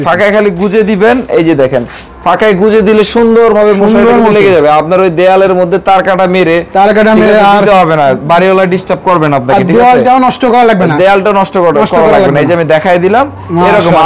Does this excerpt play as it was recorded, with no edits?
yes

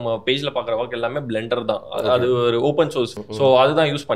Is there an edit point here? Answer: yes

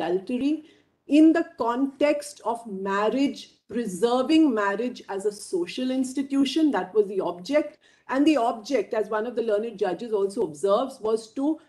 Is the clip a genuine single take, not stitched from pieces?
yes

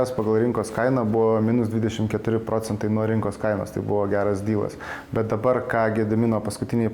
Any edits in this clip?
no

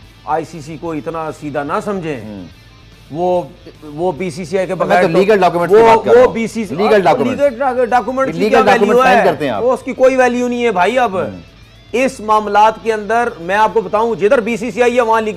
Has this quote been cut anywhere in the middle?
no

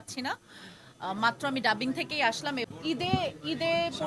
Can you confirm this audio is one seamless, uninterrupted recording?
no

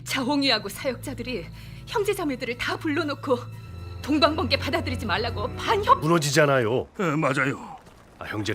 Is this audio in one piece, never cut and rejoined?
yes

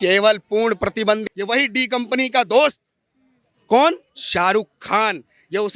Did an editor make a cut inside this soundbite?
yes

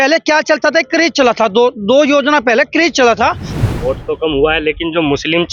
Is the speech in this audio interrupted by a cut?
yes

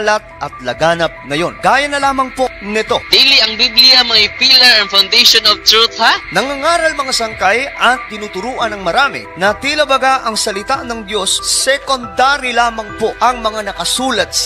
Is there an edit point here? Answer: no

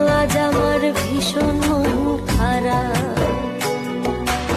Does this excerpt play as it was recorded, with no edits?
yes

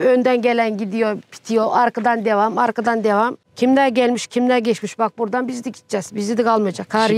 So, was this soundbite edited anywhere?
yes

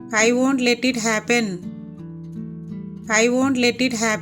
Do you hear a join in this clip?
yes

